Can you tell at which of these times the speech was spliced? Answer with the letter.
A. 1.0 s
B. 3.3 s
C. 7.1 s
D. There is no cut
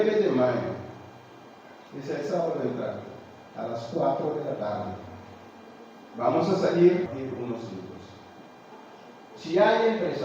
C